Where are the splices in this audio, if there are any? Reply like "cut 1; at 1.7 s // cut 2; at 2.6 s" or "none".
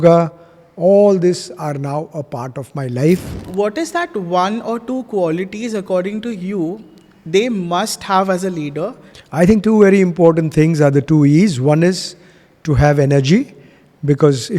cut 1; at 3.5 s // cut 2; at 9.1 s